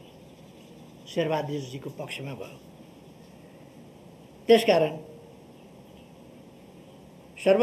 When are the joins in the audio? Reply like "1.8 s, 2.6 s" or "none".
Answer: none